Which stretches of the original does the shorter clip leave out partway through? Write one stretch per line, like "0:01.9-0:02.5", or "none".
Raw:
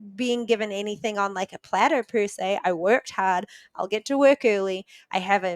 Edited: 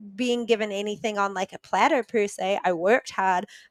none